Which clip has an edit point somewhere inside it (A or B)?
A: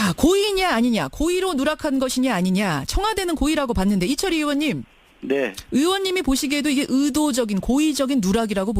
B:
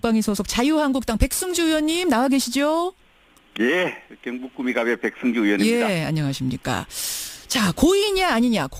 A